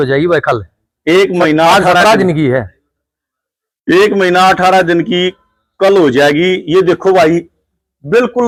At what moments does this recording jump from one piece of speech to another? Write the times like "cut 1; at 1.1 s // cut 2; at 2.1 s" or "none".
none